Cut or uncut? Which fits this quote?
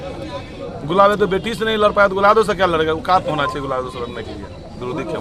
uncut